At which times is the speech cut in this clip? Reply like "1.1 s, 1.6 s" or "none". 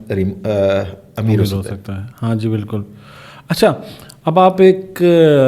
none